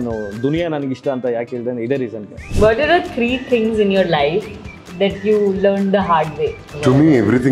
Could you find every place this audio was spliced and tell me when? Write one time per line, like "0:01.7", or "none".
0:02.4